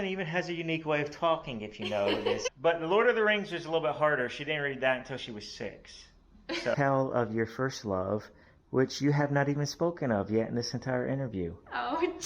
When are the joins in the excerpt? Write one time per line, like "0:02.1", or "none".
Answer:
0:02.5
0:06.7